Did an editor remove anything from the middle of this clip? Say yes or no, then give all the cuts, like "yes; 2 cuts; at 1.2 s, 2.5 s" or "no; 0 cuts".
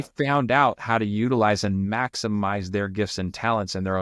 no; 0 cuts